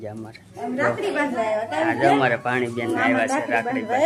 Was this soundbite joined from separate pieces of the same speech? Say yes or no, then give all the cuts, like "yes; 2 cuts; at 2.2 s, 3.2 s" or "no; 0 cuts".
no; 0 cuts